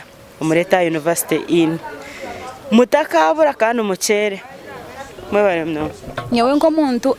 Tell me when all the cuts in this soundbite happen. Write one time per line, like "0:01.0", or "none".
0:06.2